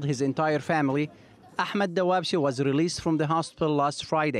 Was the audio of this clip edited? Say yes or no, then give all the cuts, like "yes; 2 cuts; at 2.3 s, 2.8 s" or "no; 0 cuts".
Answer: yes; 1 cut; at 1.3 s